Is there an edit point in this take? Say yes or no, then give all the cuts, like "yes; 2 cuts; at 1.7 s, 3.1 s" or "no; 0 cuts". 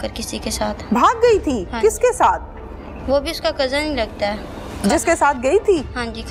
no; 0 cuts